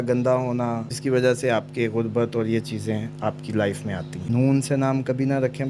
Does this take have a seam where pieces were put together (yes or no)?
yes